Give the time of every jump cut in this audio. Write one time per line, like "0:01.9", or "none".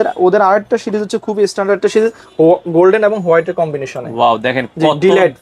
none